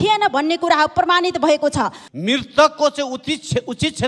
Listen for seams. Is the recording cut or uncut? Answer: cut